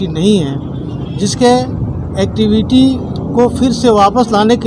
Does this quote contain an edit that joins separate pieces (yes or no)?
no